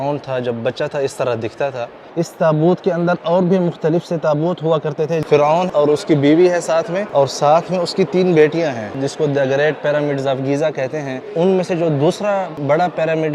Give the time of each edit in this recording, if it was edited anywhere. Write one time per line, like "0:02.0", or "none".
0:02.0
0:05.6
0:07.0
0:08.9
0:11.2
0:12.5